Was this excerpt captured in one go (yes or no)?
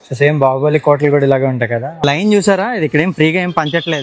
no